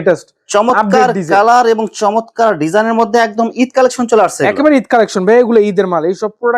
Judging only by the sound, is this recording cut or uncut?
uncut